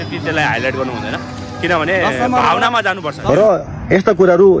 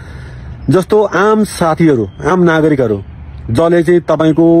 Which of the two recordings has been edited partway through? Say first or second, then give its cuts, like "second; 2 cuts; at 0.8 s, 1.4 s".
first; 1 cut; at 3.2 s